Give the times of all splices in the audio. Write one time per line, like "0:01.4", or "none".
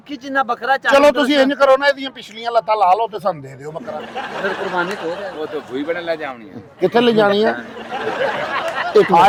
none